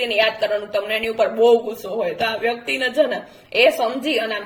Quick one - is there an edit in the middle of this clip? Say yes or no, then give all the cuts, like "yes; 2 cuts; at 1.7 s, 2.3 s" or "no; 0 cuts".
no; 0 cuts